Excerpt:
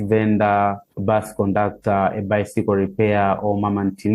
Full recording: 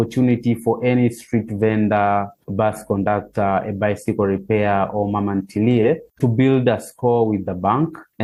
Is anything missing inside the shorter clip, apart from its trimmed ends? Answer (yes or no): no